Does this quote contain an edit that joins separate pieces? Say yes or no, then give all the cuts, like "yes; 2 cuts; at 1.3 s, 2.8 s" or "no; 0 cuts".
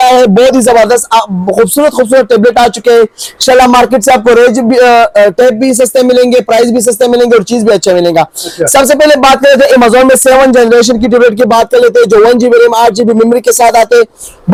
no; 0 cuts